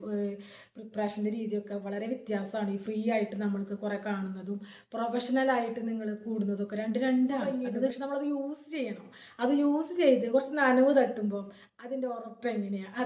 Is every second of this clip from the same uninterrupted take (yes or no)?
no